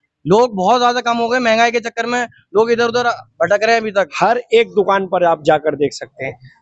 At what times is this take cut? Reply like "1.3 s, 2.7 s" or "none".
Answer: 3.9 s